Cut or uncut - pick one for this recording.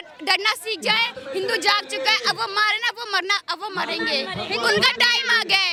uncut